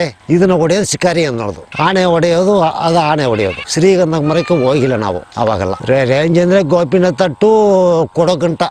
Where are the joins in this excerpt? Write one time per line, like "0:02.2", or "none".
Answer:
none